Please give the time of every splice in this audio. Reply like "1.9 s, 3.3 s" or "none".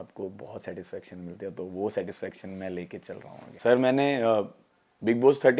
none